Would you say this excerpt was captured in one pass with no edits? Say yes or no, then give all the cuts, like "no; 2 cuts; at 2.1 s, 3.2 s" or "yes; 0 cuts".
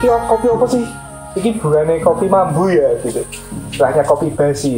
yes; 0 cuts